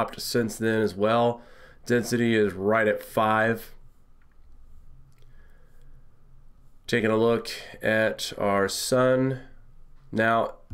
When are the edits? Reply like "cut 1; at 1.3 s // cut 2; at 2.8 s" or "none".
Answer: none